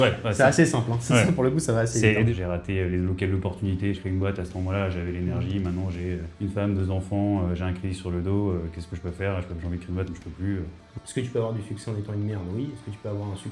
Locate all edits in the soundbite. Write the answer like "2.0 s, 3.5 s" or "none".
2.3 s, 4.0 s, 6.3 s, 10.9 s